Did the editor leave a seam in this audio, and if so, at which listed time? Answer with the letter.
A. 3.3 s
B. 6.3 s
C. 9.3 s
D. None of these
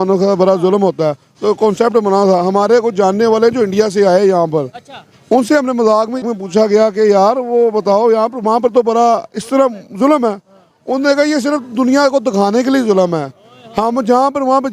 B